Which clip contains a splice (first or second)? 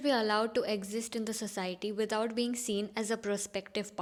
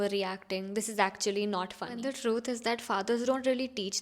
second